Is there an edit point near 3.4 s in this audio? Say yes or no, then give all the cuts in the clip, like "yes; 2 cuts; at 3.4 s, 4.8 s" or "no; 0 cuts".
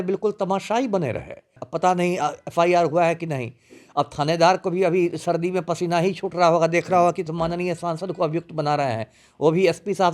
no; 1 cut; at 1.6 s